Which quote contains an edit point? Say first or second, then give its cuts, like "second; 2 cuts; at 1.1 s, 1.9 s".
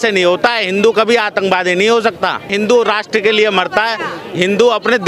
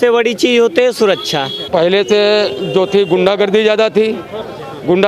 second; 1 cut; at 1.6 s